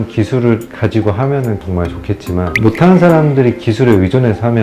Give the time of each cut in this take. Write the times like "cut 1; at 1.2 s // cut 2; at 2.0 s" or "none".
none